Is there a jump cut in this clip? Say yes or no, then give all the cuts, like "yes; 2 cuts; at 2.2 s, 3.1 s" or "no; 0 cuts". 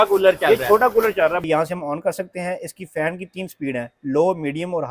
yes; 1 cut; at 1.4 s